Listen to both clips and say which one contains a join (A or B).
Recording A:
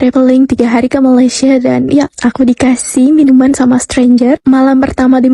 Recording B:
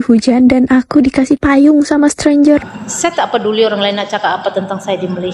B